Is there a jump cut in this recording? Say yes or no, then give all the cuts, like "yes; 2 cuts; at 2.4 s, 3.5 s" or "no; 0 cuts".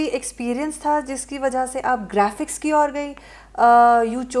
no; 0 cuts